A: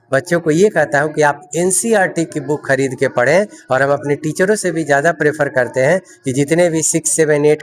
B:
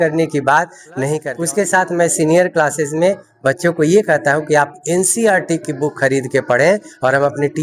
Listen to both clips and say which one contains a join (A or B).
B